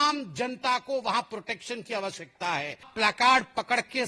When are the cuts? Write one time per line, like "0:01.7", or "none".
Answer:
0:02.9